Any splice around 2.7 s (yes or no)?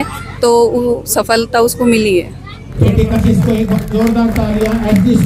yes